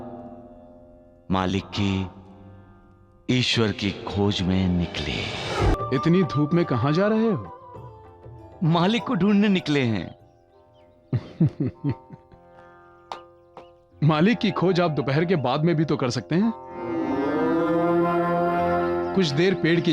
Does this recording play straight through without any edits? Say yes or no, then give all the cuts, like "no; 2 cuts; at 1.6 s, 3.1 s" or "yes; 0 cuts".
no; 1 cut; at 5.7 s